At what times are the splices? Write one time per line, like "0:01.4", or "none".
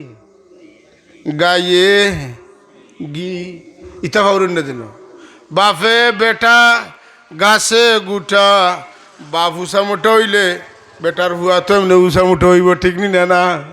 none